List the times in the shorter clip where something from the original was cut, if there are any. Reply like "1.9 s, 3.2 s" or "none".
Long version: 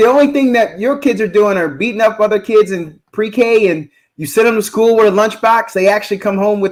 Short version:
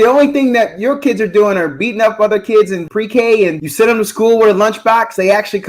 2.8 s, 3.6 s